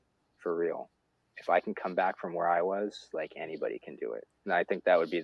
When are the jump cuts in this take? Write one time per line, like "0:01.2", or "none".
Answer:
0:04.3